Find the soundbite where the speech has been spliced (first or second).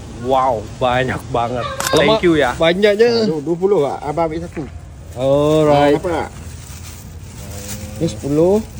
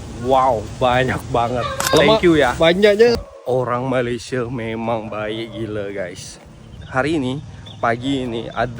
second